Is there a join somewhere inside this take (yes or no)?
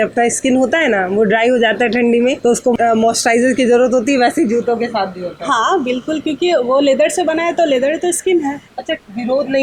no